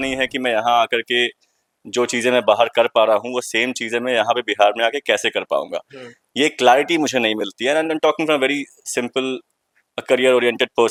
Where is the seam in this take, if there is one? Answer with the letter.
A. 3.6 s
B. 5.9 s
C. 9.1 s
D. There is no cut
D